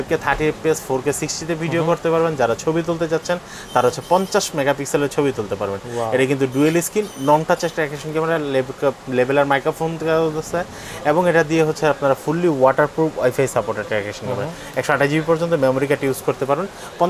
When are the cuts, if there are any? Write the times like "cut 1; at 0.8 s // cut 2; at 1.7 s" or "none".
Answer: none